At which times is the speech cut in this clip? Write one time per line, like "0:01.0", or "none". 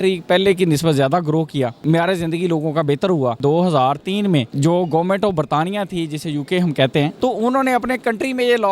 0:01.8
0:03.4
0:04.5
0:07.1